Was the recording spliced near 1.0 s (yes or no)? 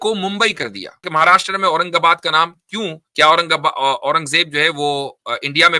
yes